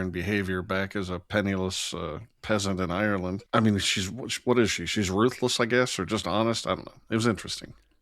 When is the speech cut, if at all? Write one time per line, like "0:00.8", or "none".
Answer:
0:03.4